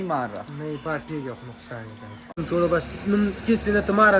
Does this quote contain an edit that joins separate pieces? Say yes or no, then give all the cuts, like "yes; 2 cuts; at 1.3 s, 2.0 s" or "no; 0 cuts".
yes; 1 cut; at 2.4 s